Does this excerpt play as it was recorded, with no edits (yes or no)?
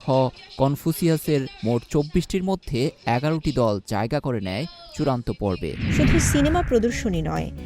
no